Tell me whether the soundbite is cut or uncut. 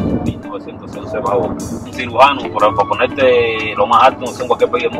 cut